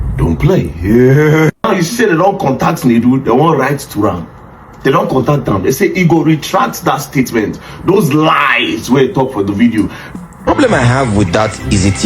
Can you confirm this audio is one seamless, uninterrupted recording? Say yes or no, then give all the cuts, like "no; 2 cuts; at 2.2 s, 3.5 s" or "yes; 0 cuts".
no; 2 cuts; at 1.6 s, 10.0 s